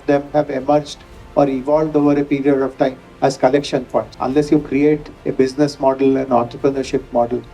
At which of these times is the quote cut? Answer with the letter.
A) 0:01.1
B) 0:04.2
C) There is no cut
B